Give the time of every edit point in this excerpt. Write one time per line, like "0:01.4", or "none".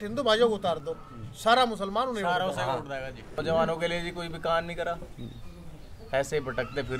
0:03.3